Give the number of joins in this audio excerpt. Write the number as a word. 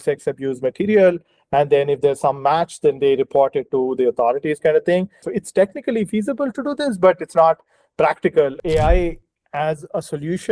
two